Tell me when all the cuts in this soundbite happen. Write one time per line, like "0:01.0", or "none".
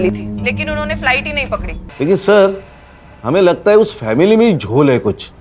0:01.8